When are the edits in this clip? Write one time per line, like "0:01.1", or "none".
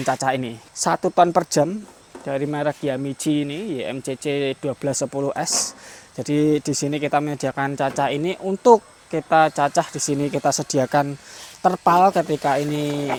none